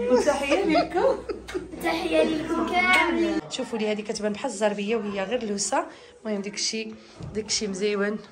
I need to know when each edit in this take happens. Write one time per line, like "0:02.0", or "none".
0:03.4